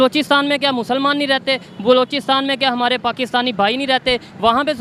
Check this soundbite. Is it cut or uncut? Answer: uncut